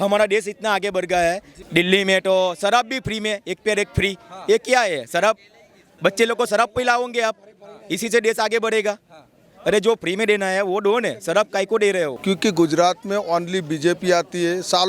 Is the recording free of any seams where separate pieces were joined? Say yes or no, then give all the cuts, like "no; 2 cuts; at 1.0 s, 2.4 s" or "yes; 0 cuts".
no; 2 cuts; at 1.6 s, 12.2 s